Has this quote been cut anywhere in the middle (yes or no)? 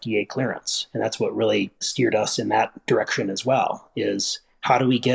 no